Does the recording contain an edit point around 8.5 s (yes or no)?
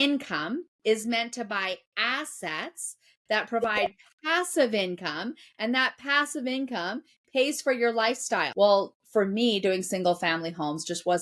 yes